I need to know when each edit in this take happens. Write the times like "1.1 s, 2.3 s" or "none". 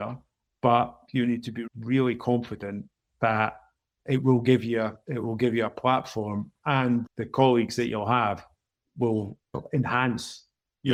none